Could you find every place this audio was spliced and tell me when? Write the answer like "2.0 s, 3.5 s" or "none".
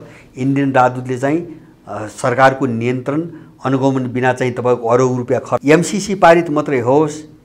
5.6 s